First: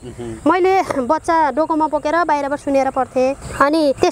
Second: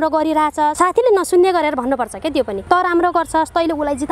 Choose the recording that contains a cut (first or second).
second